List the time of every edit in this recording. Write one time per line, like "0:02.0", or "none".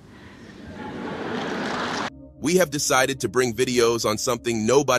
0:02.1

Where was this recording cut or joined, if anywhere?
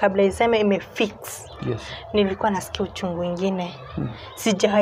none

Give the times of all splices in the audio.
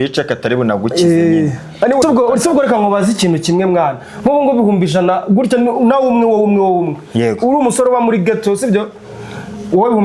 0:02.0

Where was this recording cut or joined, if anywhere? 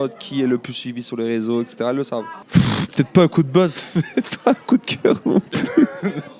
0:02.4

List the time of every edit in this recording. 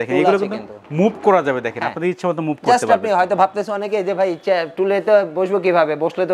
none

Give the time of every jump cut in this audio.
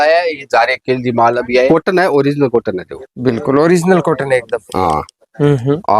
0:01.7

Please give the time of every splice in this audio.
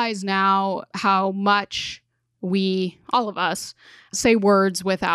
0:00.8
0:04.1

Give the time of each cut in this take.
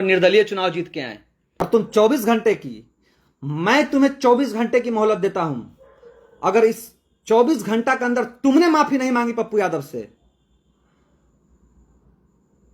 0:01.6

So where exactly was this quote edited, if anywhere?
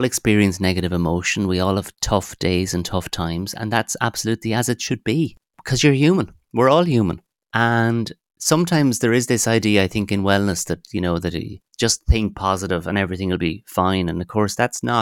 none

